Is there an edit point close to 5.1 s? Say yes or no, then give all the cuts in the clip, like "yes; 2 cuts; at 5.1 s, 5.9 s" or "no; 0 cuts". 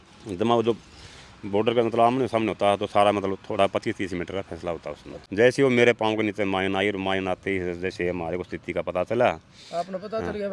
yes; 1 cut; at 5.1 s